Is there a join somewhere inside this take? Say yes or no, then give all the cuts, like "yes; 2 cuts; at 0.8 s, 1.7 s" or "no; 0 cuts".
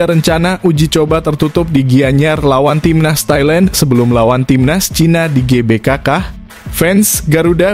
no; 0 cuts